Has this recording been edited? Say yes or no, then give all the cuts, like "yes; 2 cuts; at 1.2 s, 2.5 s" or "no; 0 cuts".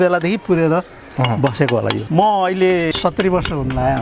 yes; 2 cuts; at 2.0 s, 2.9 s